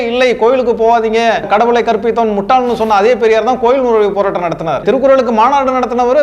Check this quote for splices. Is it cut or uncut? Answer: cut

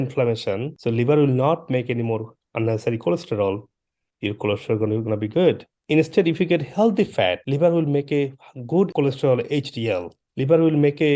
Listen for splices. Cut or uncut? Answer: cut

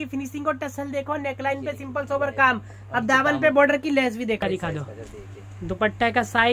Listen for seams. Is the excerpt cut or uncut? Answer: cut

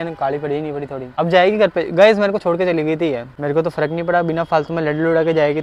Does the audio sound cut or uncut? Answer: cut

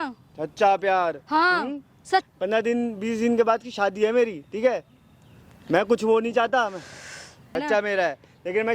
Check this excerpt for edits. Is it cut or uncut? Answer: cut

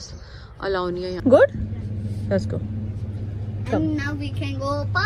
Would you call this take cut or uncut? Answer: cut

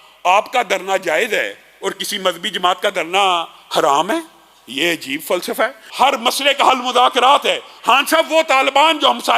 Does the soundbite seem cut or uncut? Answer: cut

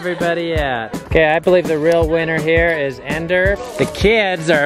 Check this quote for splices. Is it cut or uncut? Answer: cut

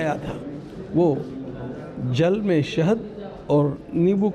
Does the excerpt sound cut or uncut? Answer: uncut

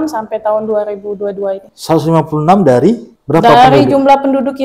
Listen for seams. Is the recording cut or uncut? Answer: cut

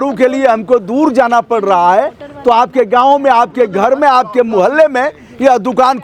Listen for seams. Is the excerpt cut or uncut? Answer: uncut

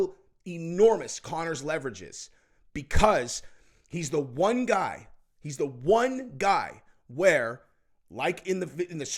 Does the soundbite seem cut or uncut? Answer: uncut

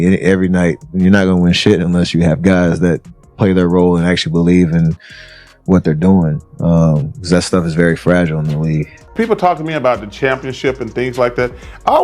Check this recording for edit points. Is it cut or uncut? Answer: cut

